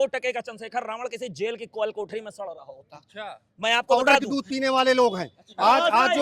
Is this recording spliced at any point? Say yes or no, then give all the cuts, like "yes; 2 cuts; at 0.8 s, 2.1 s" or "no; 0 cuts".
yes; 1 cut; at 3.9 s